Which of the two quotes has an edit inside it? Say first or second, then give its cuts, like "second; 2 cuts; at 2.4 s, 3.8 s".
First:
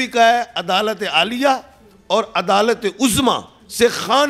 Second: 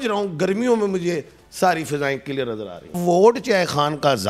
second; 1 cut; at 3.0 s